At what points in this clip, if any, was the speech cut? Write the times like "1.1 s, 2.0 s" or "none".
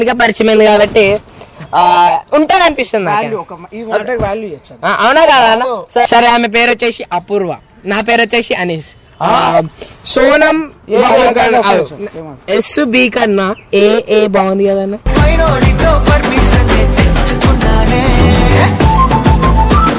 none